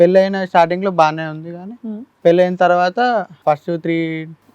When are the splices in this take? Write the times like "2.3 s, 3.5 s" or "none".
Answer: 3.4 s